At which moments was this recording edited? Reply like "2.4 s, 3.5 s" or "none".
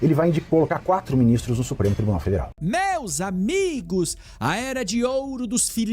2.5 s